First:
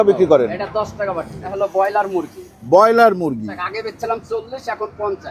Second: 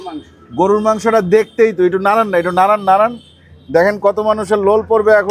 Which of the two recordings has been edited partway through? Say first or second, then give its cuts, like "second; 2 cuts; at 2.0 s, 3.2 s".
first; 2 cuts; at 1.5 s, 3.5 s